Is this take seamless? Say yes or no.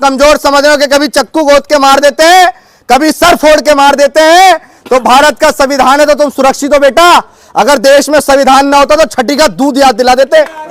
yes